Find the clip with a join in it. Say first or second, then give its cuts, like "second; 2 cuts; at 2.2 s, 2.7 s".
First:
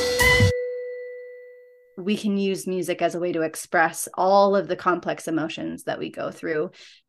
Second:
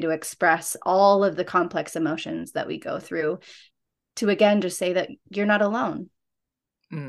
first; 1 cut; at 1.9 s